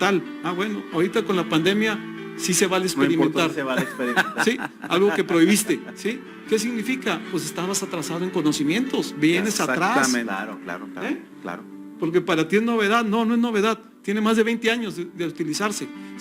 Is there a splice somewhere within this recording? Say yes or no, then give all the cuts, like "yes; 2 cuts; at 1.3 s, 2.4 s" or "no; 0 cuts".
no; 0 cuts